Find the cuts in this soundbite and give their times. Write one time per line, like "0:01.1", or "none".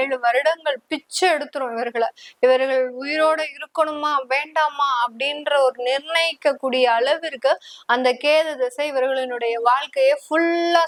none